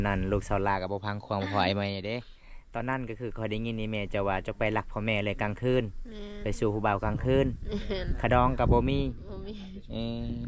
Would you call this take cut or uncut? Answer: uncut